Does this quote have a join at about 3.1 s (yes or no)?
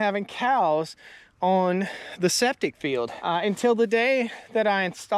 yes